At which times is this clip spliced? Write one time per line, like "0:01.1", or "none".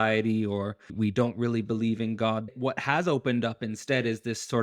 0:00.9
0:02.5